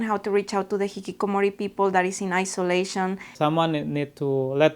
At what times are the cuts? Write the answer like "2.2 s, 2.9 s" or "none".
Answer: 3.3 s

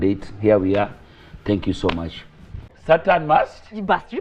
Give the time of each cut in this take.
2.7 s

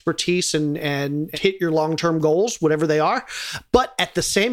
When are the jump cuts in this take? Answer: 1.3 s

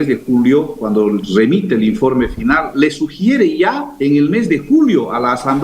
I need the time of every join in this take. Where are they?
2.7 s, 3.9 s

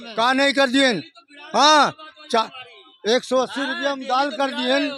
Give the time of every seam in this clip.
none

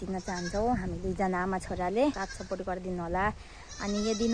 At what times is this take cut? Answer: 2.3 s

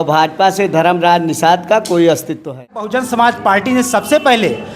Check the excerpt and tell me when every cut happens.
2.9 s

